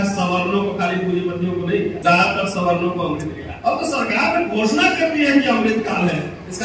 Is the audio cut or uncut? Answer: cut